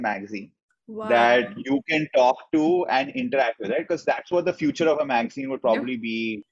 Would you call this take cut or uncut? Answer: uncut